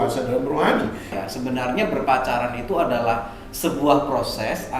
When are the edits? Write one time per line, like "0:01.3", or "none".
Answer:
0:01.2

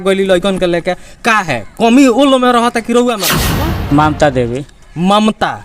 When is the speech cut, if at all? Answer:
0:03.4

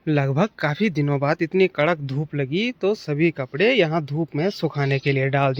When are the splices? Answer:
none

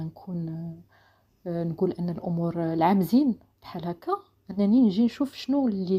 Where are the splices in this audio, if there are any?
none

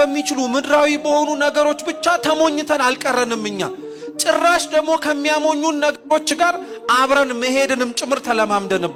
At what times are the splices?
none

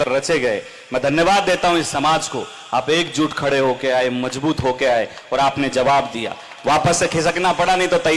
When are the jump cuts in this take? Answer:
none

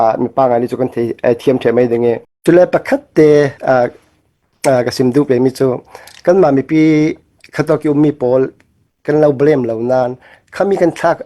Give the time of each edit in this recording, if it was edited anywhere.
0:02.3

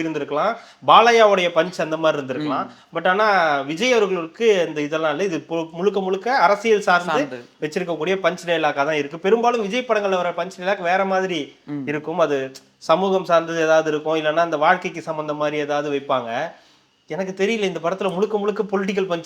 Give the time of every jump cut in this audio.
none

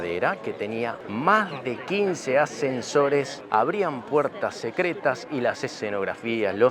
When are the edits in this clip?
0:01.0
0:03.4

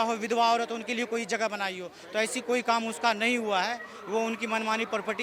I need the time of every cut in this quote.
none

